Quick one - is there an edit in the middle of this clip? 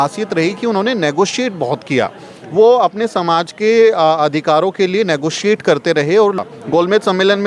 yes; 1 cut; at 6.4 s

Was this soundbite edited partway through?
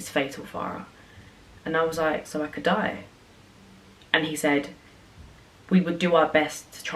no; 0 cuts

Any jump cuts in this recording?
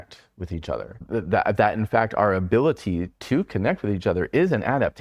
yes; 1 cut; at 1.0 s

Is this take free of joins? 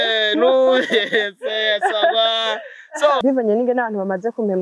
no; 1 cut; at 3.2 s

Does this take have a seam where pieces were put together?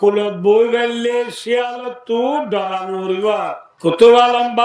yes; 1 cut; at 3.7 s

